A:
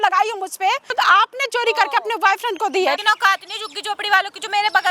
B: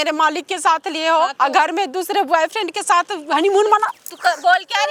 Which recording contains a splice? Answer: A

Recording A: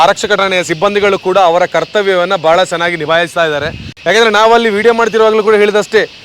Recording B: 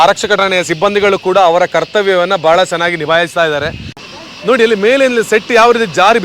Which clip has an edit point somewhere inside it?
B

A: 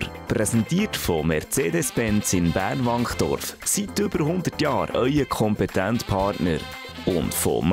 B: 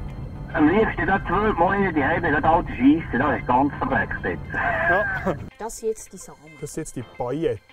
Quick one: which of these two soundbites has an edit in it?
B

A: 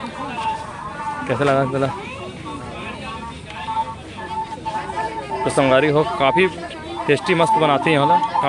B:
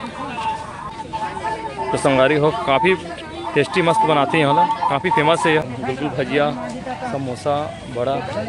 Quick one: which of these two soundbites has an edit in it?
B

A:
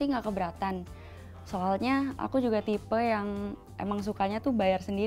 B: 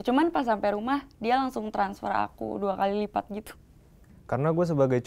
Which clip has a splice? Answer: B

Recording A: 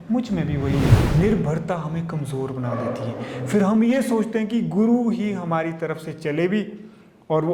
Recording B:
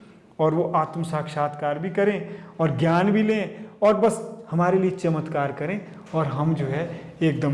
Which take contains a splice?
A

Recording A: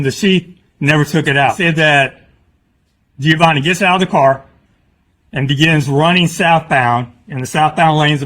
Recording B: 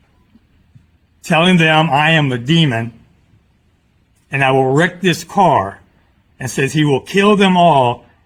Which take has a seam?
A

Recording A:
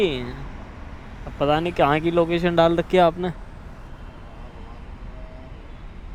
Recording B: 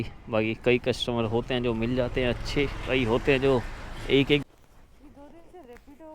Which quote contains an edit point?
B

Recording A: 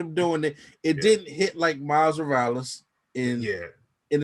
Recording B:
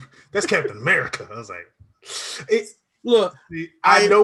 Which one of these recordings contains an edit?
A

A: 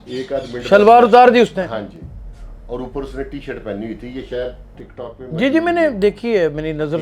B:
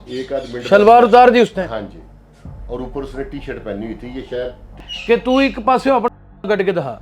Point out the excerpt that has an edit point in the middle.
B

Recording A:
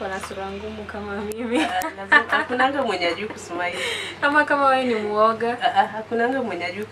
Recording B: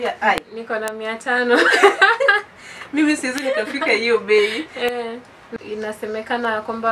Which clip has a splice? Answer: B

